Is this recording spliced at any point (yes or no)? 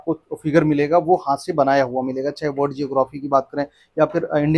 no